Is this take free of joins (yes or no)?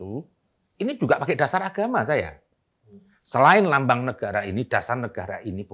yes